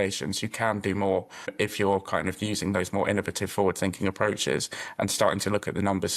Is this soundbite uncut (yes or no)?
no